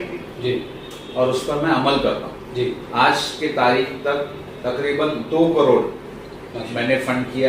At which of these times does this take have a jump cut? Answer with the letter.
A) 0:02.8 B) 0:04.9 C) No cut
A